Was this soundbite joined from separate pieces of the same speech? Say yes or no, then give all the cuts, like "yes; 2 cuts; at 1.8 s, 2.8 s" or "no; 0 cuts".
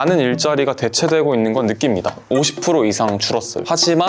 yes; 1 cut; at 2.3 s